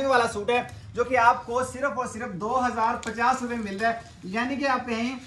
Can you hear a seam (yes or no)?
no